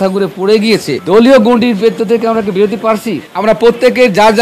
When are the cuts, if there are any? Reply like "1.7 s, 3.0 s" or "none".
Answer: 0.9 s